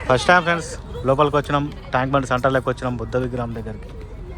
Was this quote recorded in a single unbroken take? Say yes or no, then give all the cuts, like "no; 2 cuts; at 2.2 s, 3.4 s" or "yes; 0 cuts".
yes; 0 cuts